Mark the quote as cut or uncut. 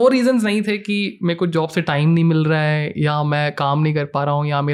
uncut